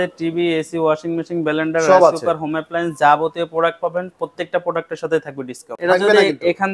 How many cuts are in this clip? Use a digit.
1